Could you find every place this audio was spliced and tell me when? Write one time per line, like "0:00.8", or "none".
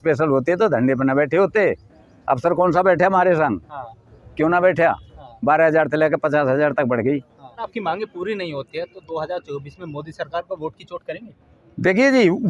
none